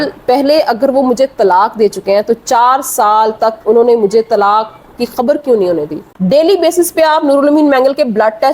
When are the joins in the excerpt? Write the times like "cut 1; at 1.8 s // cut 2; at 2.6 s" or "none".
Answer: cut 1; at 5.9 s

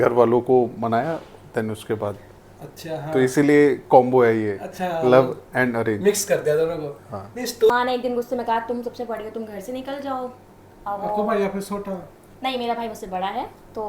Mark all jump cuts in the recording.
cut 1; at 7.7 s

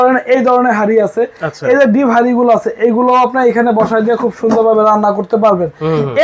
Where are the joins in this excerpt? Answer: none

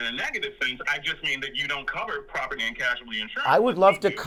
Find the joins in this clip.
none

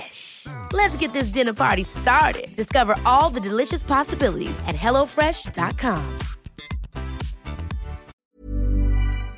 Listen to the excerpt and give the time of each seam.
cut 1; at 8.2 s

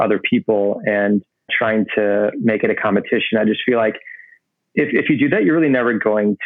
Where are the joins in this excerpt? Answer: cut 1; at 1.5 s

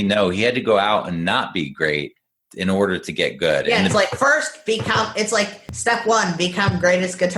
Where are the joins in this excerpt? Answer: cut 1; at 3.8 s

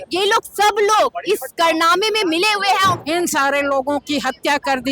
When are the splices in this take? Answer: cut 1; at 3.0 s

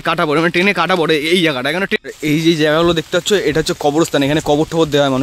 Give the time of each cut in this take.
cut 1; at 2.0 s

